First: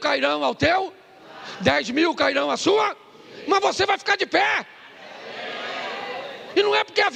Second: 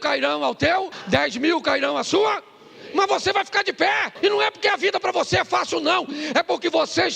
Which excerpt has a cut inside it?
second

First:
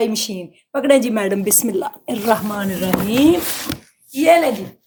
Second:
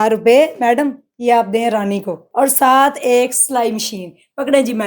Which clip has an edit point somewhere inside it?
second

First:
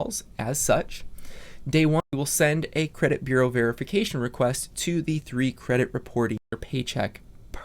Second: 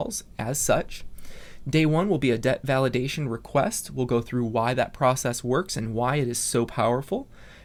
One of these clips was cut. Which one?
first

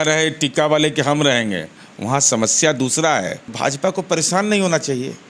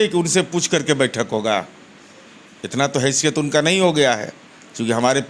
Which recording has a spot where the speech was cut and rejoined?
first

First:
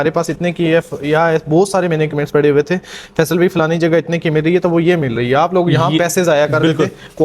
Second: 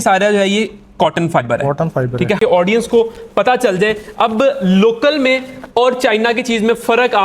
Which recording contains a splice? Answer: second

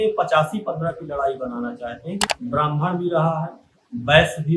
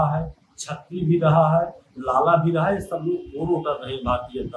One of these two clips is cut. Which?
first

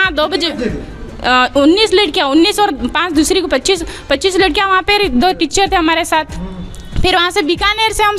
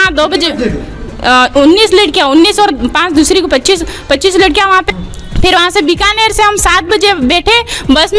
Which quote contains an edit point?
second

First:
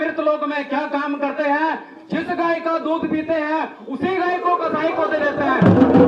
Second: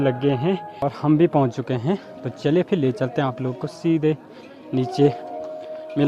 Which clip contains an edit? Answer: second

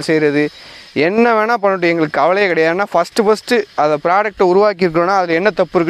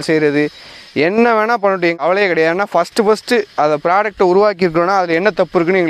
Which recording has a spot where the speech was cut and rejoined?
second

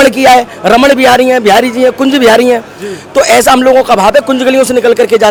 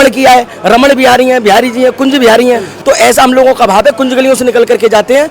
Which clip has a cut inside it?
second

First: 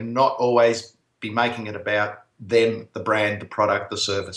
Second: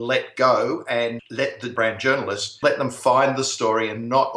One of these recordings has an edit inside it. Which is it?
second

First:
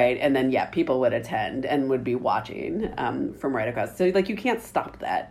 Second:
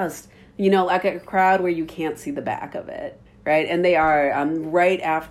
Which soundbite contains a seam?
second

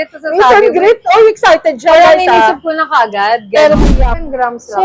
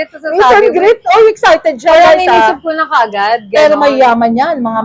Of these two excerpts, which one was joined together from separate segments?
first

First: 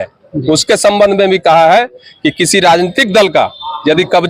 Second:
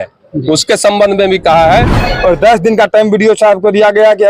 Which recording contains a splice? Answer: second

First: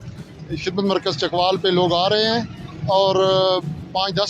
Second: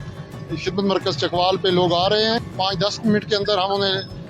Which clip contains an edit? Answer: second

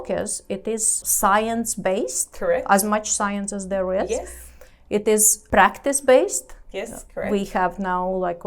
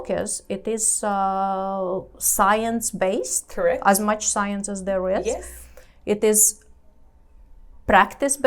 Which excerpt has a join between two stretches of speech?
first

